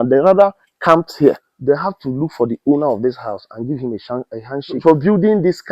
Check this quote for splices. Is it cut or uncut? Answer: cut